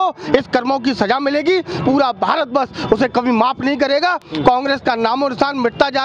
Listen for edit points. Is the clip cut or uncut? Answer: uncut